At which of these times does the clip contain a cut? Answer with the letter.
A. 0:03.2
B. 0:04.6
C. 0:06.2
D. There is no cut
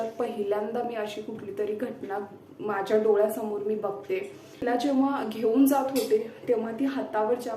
B